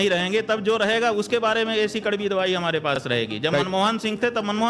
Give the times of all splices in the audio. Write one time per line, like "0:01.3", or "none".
none